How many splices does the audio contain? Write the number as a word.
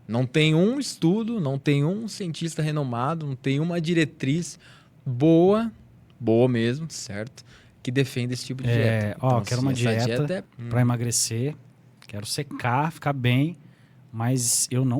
one